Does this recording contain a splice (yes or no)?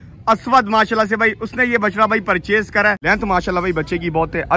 yes